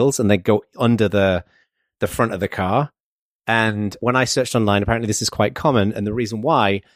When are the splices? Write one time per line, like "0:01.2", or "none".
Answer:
0:04.0